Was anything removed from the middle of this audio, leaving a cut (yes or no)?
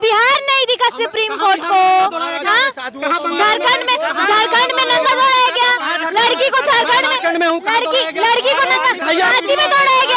no